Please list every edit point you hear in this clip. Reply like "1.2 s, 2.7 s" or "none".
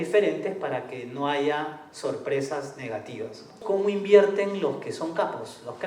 3.6 s